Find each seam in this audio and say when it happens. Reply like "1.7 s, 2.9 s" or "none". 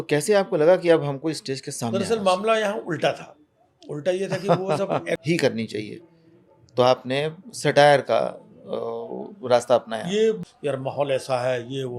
1.9 s, 5.2 s, 10.4 s

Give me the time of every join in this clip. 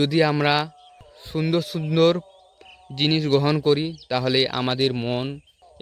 none

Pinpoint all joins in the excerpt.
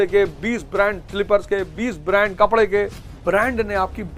3.1 s

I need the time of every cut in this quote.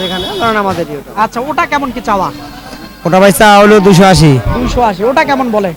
none

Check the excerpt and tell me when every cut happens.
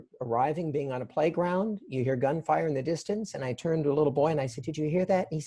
none

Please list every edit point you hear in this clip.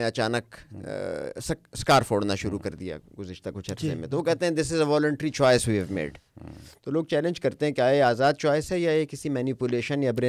none

